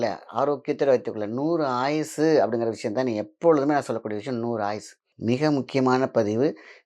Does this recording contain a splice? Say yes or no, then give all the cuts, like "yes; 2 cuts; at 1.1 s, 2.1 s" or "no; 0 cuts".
yes; 1 cut; at 5.1 s